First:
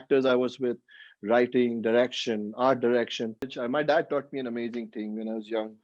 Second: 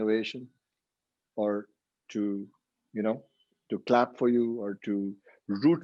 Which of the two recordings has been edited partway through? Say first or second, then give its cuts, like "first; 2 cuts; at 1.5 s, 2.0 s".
first; 1 cut; at 3.6 s